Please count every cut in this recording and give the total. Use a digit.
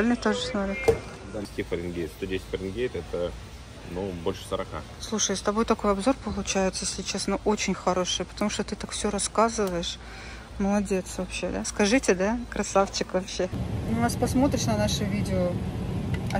2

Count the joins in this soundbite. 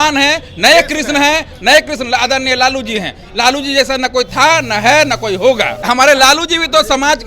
1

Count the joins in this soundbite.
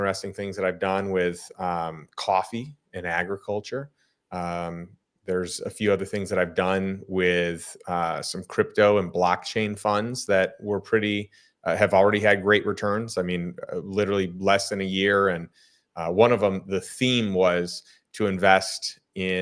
0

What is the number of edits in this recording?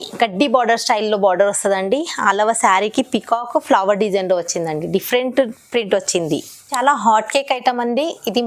1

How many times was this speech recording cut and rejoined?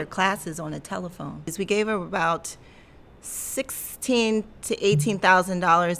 1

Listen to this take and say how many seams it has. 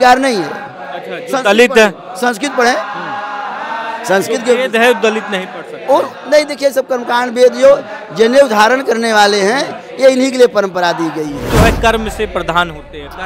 1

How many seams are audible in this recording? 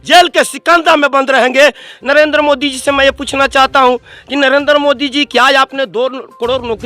1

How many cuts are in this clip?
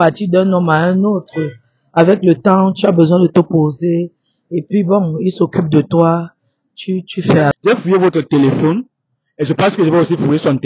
1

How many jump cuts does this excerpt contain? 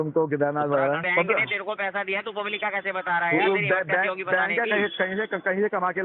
1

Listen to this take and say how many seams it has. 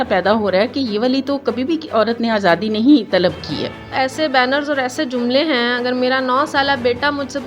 1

